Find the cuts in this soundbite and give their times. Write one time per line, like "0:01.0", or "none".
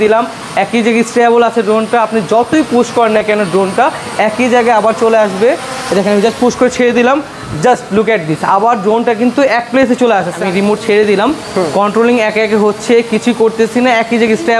0:10.4